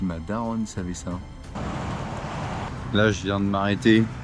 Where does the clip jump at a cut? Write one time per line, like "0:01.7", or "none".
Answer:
0:01.4
0:02.7